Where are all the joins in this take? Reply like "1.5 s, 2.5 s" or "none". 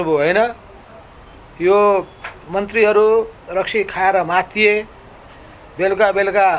none